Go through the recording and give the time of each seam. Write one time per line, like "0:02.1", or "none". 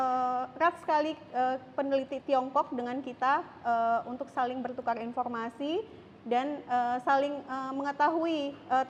none